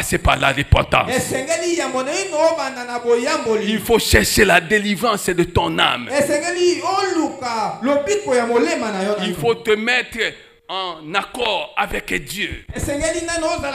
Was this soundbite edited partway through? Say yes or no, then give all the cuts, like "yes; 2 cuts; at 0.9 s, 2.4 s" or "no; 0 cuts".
no; 0 cuts